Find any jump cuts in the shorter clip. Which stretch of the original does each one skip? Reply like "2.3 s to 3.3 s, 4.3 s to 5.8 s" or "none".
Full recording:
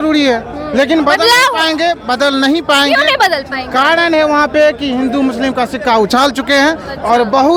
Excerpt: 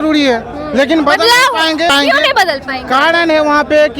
1.9 s to 2.7 s